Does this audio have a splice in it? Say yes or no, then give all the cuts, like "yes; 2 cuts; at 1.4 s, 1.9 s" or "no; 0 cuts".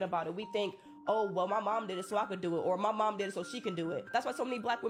no; 0 cuts